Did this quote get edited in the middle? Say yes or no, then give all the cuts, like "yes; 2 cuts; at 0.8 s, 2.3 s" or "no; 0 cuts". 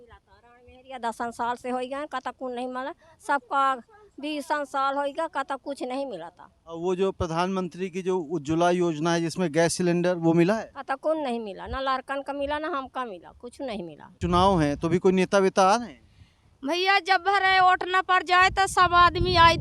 yes; 1 cut; at 14.2 s